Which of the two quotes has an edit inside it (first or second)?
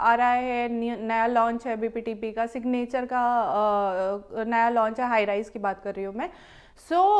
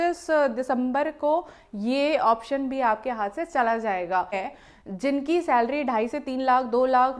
second